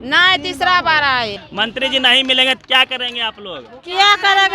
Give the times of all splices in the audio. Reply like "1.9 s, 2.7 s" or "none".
1.4 s